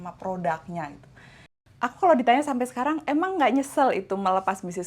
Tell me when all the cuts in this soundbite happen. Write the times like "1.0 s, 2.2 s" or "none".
1.6 s